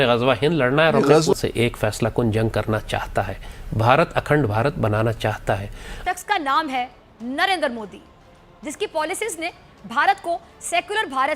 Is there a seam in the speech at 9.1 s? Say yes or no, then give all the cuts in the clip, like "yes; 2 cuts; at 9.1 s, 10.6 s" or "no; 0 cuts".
no; 2 cuts; at 1.3 s, 6.1 s